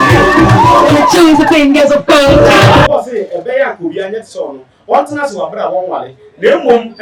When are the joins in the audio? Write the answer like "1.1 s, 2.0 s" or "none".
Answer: 2.7 s